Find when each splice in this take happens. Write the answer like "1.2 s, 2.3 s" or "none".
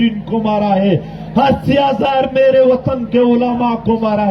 none